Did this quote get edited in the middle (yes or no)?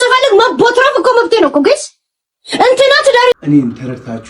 yes